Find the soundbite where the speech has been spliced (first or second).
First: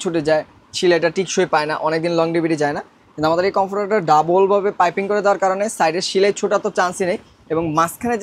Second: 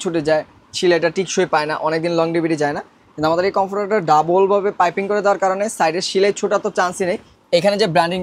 second